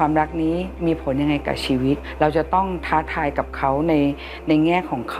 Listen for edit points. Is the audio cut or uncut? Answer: cut